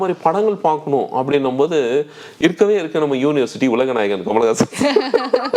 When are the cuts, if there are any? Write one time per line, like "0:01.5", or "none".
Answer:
none